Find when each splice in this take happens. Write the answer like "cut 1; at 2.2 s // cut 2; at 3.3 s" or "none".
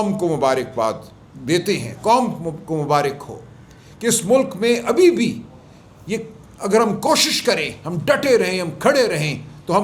none